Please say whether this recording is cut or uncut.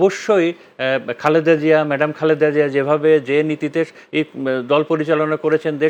uncut